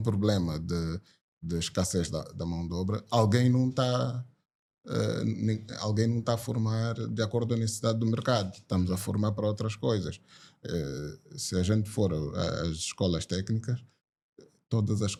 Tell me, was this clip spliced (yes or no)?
no